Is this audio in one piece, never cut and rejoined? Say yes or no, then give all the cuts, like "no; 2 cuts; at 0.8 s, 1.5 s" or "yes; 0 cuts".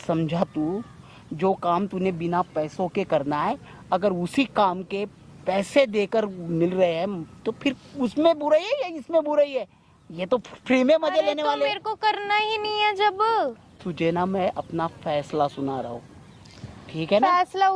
yes; 0 cuts